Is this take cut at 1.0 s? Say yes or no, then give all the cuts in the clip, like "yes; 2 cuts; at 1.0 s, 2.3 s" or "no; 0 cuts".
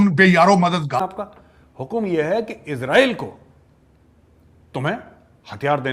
yes; 1 cut; at 1.0 s